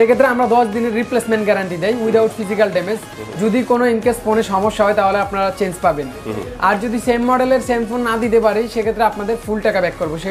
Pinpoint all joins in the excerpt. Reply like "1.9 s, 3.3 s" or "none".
none